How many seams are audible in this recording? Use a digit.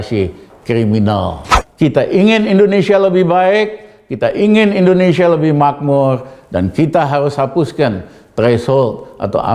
1